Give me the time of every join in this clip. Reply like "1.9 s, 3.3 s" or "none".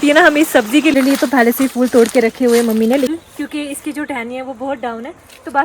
0.9 s, 3.1 s